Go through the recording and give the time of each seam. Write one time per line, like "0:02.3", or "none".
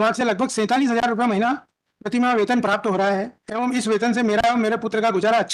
none